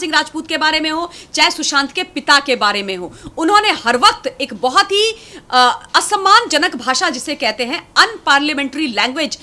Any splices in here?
no; 0 cuts

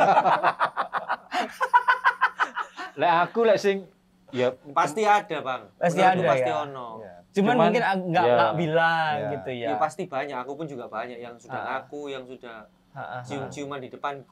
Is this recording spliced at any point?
no; 0 cuts

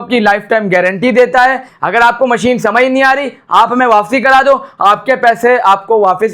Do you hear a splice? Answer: yes; 1 cut; at 1.7 s

